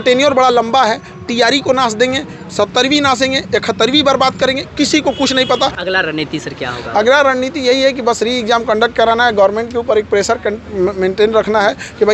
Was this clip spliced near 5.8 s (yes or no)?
yes